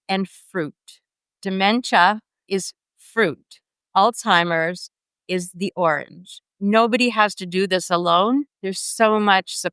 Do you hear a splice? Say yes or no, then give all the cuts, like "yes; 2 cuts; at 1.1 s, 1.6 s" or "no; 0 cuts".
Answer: yes; 1 cut; at 6.4 s